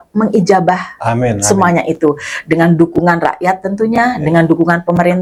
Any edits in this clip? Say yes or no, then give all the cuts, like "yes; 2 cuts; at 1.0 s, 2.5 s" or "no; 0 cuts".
no; 0 cuts